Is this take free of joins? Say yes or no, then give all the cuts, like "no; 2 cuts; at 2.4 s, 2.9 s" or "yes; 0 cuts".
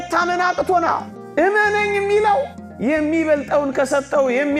yes; 0 cuts